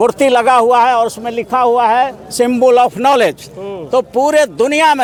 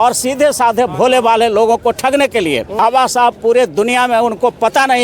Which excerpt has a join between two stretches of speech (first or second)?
second